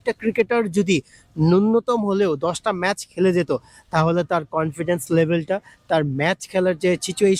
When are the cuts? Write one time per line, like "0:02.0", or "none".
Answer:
none